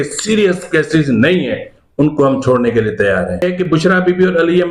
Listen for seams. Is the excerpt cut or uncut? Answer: cut